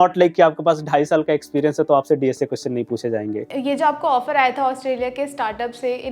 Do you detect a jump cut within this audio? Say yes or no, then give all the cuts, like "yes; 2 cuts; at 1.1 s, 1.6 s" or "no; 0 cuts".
yes; 1 cut; at 3.5 s